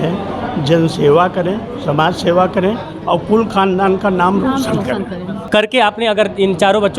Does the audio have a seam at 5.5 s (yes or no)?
yes